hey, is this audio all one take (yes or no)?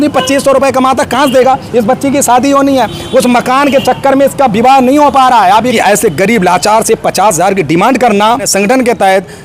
no